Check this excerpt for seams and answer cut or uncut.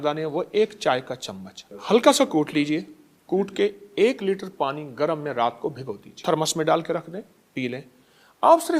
cut